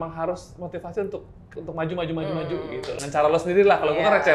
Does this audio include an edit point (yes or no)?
yes